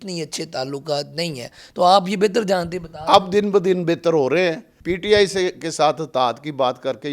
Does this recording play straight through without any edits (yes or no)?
no